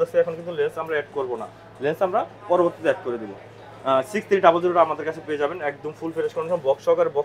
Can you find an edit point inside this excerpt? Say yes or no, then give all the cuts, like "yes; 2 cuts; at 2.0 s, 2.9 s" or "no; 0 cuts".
no; 0 cuts